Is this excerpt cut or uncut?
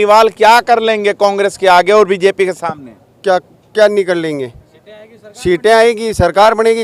uncut